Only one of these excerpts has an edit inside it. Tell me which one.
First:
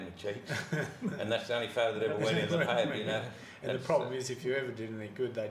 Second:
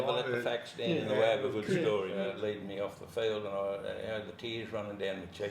second; 1 cut; at 2.1 s

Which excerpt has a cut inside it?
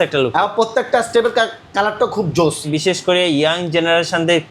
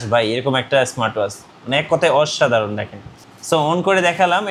first; 1 cut; at 2.7 s

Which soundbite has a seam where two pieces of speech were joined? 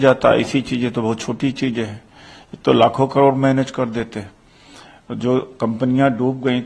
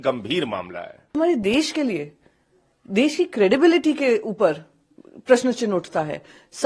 second; 1 cut; at 1.1 s

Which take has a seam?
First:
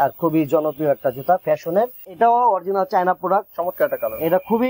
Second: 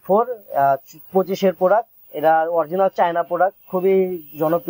first; 1 cut; at 2.0 s

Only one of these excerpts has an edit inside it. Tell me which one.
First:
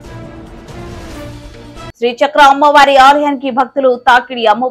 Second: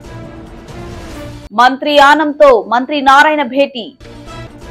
first; 1 cut; at 1.4 s

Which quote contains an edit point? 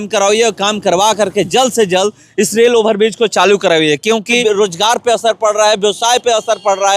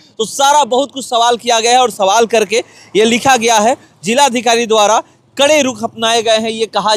first; 1 cut; at 4.4 s

